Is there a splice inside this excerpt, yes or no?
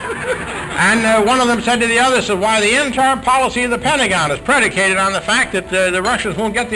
no